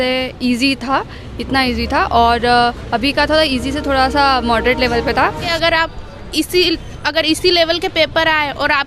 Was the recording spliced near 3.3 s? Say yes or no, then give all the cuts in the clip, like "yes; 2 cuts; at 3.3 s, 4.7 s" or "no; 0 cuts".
no; 1 cut; at 5.4 s